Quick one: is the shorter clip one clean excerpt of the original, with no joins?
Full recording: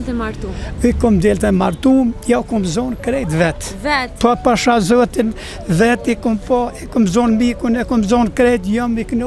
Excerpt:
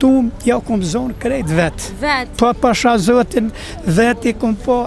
yes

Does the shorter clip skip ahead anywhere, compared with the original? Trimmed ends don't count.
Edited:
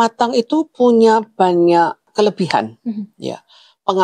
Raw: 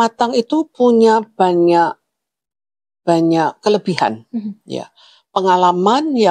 yes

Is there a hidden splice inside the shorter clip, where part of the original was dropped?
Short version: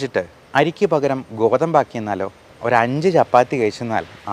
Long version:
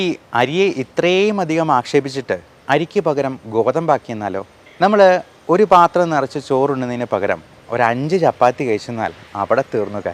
yes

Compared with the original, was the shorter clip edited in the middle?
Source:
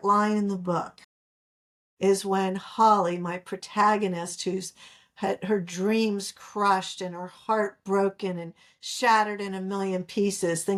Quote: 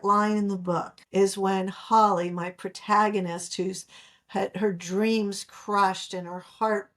yes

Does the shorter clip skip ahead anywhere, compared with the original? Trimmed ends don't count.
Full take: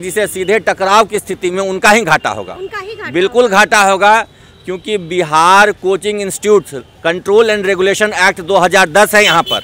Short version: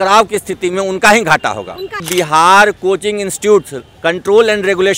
yes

